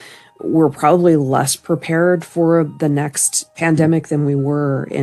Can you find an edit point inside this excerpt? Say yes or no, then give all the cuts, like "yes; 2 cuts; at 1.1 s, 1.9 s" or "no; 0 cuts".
no; 0 cuts